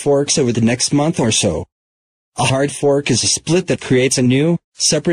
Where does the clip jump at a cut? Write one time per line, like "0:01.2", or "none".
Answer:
0:02.7